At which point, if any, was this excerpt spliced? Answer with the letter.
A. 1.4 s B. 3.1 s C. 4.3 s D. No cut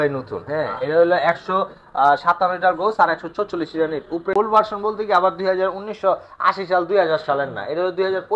C